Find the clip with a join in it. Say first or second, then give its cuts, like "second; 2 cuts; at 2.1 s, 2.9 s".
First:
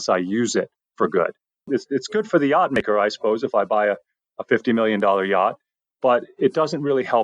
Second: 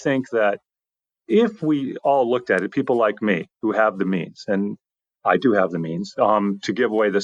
first; 1 cut; at 1.6 s